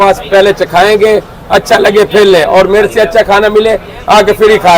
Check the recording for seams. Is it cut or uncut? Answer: uncut